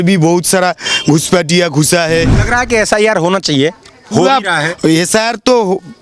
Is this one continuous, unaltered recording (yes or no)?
no